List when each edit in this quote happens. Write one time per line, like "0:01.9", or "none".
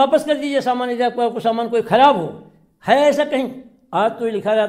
none